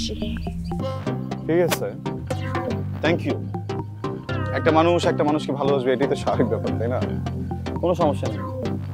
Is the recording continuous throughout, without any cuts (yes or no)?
no